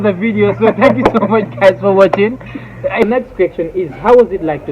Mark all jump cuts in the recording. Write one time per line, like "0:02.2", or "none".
0:03.0